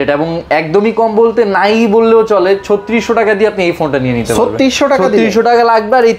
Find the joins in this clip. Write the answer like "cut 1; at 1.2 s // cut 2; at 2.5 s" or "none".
none